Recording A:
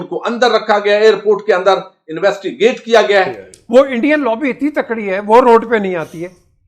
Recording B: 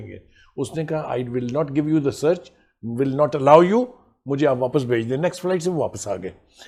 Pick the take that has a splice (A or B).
A